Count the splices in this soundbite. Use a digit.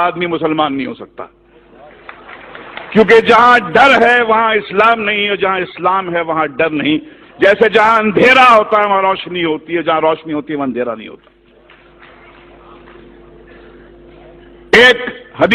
0